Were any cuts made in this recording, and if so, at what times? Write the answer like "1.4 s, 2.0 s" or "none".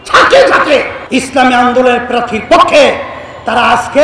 1.0 s